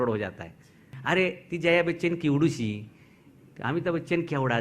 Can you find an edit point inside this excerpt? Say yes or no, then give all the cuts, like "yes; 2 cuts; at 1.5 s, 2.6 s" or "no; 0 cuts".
yes; 1 cut; at 0.9 s